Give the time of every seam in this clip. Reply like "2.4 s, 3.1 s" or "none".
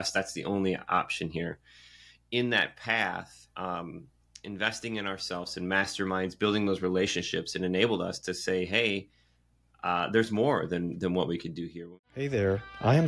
11.8 s